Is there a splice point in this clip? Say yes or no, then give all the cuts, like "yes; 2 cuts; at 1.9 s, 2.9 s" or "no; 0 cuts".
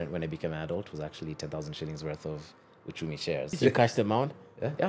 yes; 1 cut; at 3.5 s